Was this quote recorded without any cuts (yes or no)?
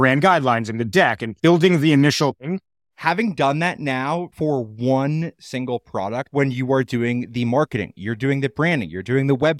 no